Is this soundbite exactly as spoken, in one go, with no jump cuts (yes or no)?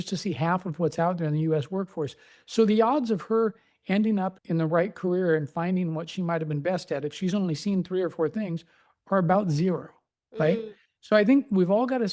no